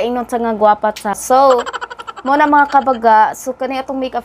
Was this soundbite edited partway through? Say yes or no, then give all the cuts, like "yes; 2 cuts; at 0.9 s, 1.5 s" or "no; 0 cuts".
yes; 1 cut; at 1.2 s